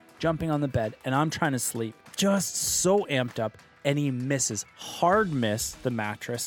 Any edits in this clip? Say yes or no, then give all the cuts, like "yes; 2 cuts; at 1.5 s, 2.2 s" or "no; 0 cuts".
yes; 1 cut; at 1.8 s